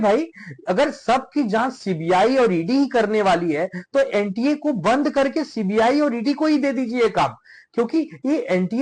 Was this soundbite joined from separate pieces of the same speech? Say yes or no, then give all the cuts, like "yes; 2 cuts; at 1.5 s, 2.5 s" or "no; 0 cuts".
no; 0 cuts